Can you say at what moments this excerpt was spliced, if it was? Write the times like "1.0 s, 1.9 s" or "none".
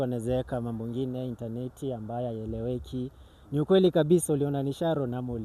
none